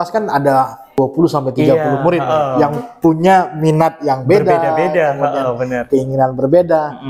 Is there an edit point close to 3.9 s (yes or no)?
no